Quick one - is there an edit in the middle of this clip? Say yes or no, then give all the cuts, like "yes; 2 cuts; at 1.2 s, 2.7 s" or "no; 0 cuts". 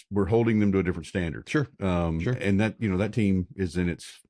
no; 0 cuts